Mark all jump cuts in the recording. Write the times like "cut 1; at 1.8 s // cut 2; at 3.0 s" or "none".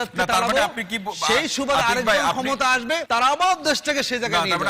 cut 1; at 3.0 s

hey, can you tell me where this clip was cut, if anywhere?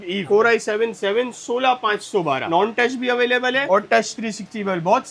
cut 1; at 2.5 s

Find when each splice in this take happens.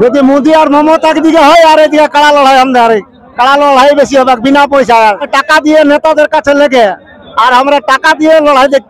cut 1; at 5.3 s

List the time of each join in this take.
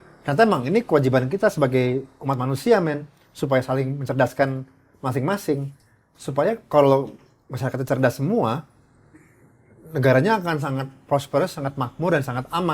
none

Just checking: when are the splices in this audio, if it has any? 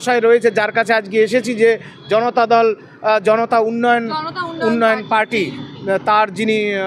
none

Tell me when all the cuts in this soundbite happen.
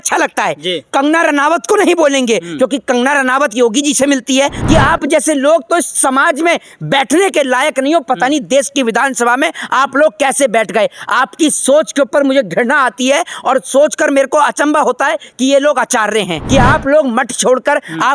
cut 1; at 4.6 s // cut 2; at 16.4 s

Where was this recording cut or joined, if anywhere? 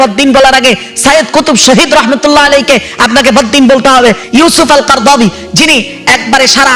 cut 1; at 4.2 s

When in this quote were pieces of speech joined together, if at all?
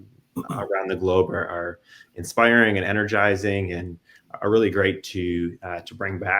none

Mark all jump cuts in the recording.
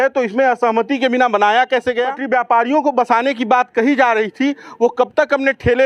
cut 1; at 2.2 s

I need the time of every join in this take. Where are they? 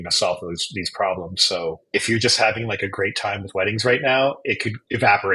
none

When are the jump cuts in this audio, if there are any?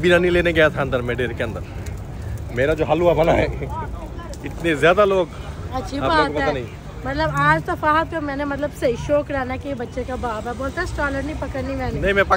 none

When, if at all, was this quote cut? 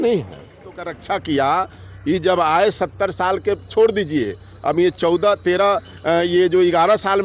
cut 1; at 1.0 s

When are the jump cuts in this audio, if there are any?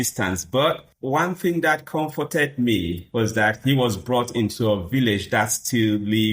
cut 1; at 0.9 s

